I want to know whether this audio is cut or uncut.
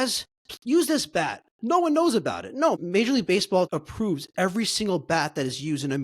cut